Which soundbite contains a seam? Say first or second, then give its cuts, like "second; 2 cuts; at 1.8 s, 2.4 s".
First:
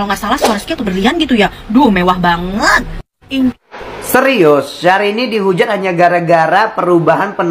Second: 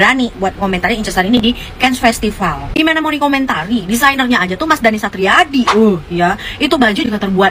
first; 1 cut; at 3.6 s